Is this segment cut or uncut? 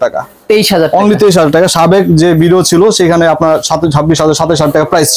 uncut